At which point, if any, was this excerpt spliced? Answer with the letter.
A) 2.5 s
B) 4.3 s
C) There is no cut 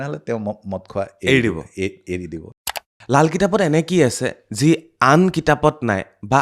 A